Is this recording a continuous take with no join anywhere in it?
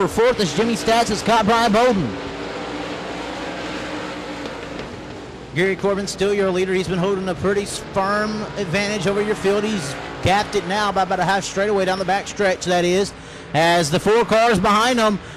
yes; 0 cuts

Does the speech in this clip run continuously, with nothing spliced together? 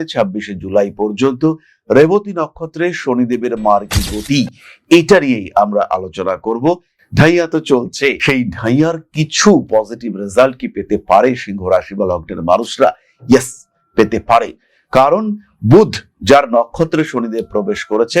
no; 1 cut; at 6.9 s

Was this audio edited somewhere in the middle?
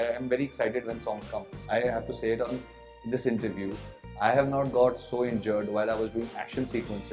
yes; 1 cut; at 1.6 s

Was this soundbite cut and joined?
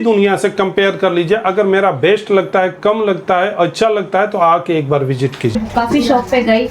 yes; 1 cut; at 5.6 s

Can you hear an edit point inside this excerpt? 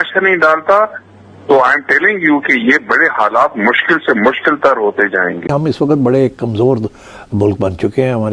yes; 1 cut; at 5.5 s

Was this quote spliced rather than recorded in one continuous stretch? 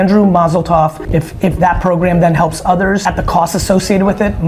yes; 2 cuts; at 1.0 s, 3.0 s

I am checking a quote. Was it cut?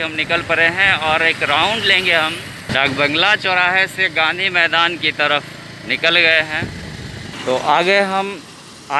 yes; 2 cuts; at 2.7 s, 7.3 s

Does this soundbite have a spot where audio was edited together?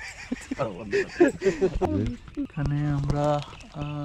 yes; 1 cut; at 1.9 s

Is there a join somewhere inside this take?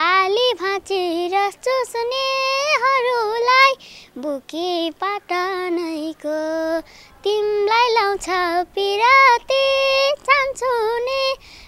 no; 0 cuts

